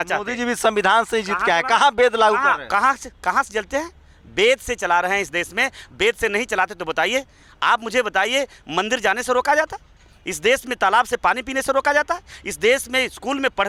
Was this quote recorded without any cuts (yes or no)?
yes